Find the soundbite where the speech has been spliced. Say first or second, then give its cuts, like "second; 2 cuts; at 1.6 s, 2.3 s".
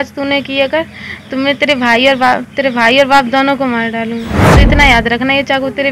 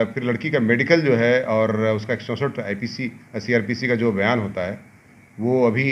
first; 1 cut; at 4.4 s